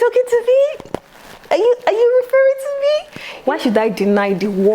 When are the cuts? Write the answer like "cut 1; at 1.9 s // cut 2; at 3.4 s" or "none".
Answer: cut 1; at 3.3 s